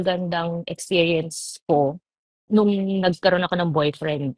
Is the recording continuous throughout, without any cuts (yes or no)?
yes